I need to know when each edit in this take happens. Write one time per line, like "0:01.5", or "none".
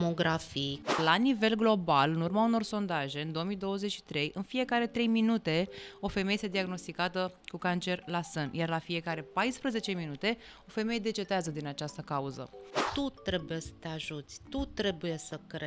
0:01.0
0:12.9